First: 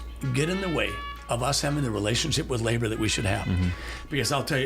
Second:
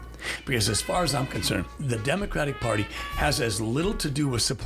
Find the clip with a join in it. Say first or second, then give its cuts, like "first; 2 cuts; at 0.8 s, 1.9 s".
second; 1 cut; at 1.8 s